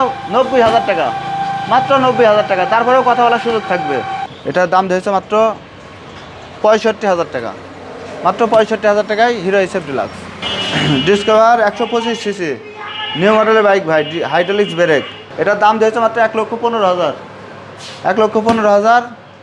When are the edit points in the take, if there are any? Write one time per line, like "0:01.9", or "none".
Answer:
0:04.2
0:10.4
0:15.2